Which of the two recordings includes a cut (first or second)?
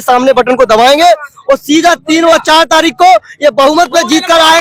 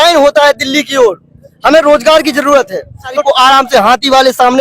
second